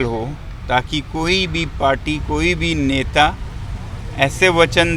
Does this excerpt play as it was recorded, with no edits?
yes; 0 cuts

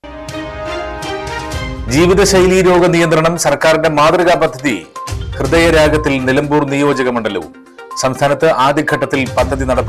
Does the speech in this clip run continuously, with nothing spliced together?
yes; 0 cuts

